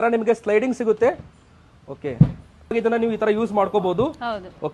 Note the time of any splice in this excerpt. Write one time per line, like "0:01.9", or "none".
0:02.8